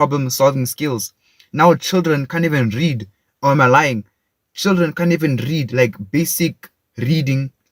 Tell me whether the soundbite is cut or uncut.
uncut